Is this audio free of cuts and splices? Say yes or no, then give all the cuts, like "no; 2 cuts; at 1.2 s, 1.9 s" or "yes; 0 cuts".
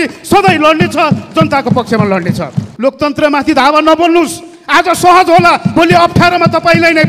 no; 1 cut; at 2.6 s